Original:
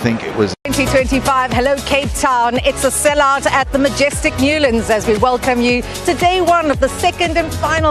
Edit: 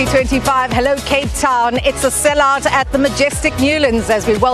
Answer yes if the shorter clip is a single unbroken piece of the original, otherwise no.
yes